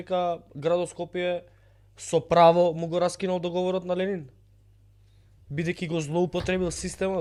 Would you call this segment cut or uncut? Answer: uncut